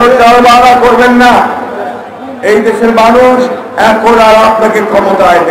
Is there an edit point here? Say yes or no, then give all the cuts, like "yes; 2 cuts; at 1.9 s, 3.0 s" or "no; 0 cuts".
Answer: no; 0 cuts